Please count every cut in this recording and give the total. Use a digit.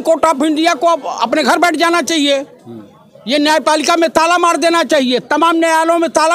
0